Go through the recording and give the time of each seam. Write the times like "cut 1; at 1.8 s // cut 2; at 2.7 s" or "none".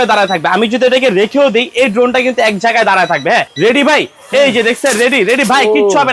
cut 1; at 3.5 s